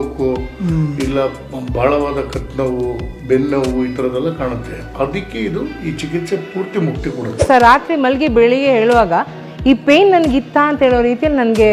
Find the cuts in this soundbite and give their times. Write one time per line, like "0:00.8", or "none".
0:07.4

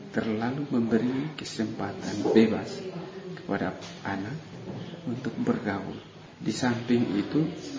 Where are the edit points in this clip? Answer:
none

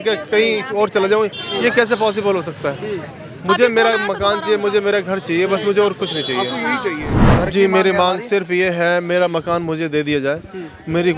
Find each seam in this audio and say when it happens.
0:07.1

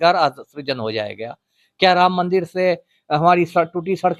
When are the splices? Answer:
none

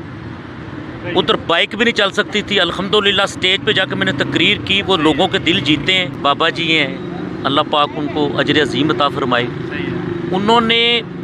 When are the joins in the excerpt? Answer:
0:06.2

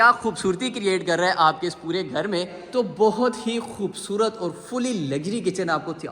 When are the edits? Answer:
0:02.6

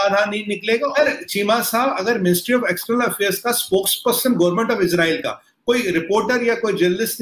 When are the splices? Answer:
0:00.9

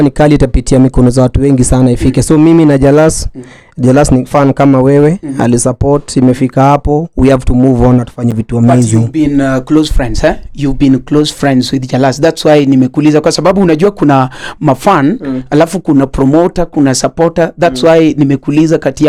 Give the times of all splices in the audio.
none

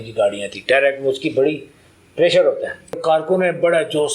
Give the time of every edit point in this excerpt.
0:03.0

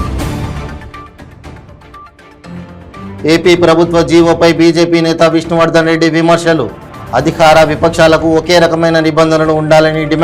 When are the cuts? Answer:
0:03.2

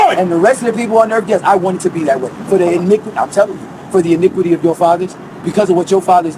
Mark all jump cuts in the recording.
0:02.9

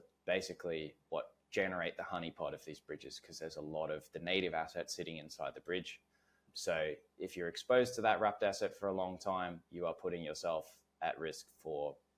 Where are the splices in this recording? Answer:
none

